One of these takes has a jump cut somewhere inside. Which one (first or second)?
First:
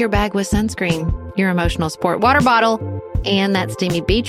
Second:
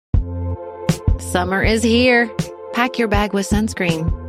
second